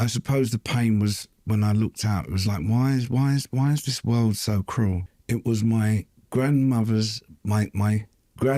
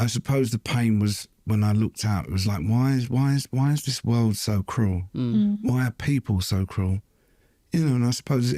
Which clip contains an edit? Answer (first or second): first